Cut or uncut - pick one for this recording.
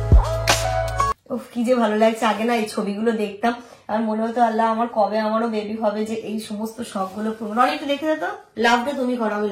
cut